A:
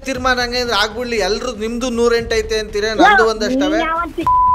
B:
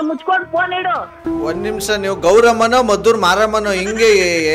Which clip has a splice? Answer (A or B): B